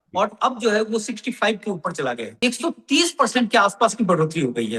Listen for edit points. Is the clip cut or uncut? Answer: cut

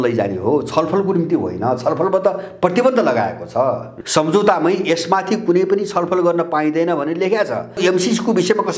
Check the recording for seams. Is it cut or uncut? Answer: cut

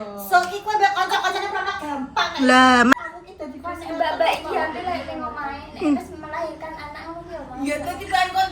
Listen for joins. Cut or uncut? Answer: cut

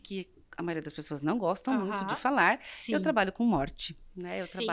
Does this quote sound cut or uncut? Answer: uncut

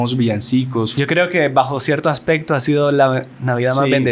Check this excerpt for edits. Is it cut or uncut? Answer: cut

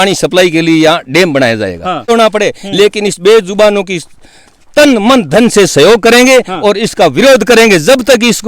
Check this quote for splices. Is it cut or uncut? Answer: cut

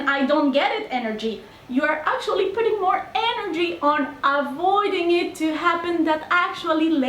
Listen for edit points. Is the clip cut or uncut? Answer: cut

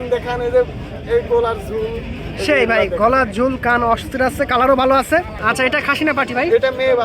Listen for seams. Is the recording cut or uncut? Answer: cut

